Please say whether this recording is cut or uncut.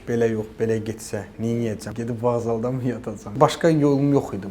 cut